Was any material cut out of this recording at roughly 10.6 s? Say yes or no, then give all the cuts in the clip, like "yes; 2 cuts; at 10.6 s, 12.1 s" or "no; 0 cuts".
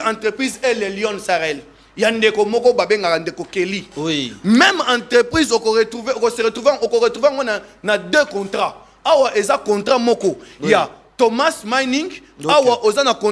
no; 0 cuts